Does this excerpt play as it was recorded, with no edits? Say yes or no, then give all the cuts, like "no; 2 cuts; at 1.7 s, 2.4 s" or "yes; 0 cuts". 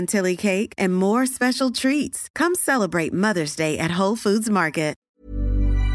no; 1 cut; at 5.0 s